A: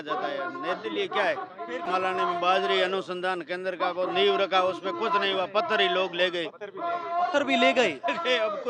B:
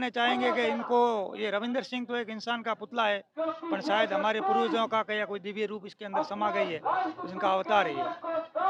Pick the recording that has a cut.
A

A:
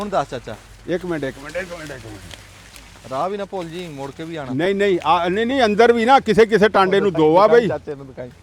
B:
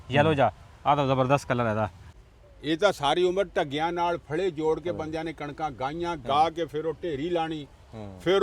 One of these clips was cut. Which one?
B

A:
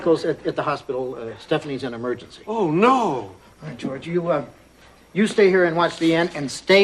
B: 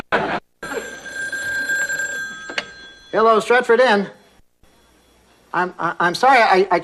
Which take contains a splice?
A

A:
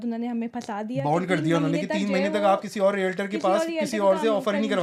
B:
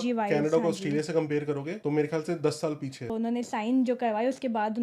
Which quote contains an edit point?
B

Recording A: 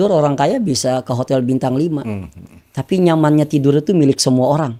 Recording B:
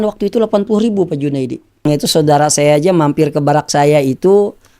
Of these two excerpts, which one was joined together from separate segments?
B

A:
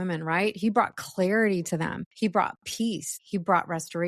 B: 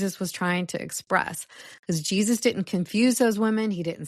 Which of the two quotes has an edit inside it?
A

